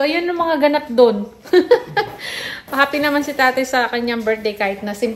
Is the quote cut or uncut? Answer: uncut